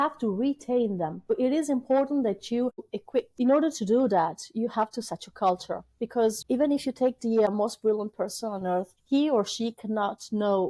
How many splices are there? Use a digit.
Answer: 5